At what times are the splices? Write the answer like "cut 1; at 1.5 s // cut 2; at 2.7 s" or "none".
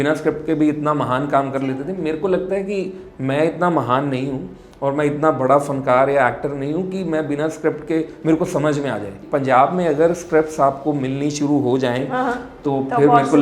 cut 1; at 9.2 s